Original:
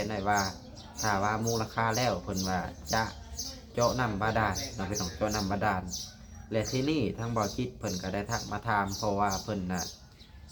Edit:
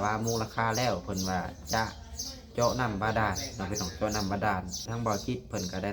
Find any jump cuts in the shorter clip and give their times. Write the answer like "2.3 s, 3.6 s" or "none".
4.9 s